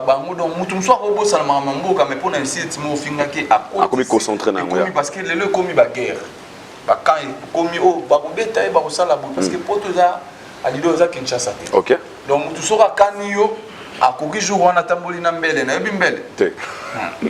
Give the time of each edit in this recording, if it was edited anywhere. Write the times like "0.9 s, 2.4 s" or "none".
none